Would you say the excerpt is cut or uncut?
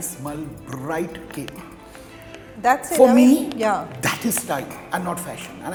uncut